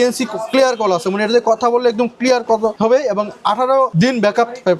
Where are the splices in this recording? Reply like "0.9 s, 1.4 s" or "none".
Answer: 2.8 s, 3.9 s

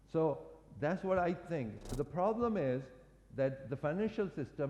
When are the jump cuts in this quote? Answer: 1.8 s

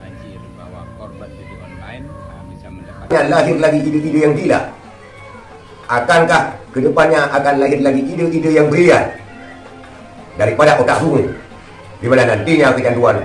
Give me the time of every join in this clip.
3.1 s

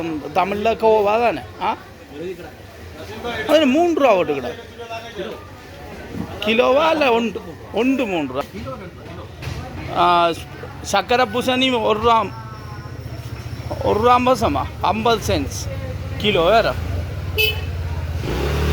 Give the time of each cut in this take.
8.4 s

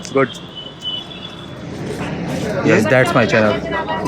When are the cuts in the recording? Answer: 1.5 s

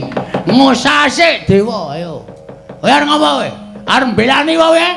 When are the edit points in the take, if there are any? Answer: 3.1 s

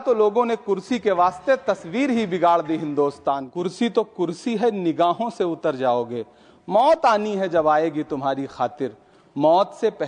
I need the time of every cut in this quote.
3.5 s

